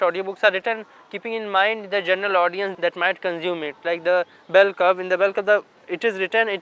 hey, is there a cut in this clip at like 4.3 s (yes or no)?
no